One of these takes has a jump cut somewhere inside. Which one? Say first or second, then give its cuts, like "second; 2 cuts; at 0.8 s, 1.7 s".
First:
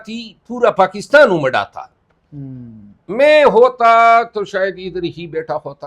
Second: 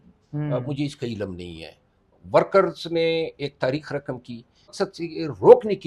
second; 1 cut; at 4.7 s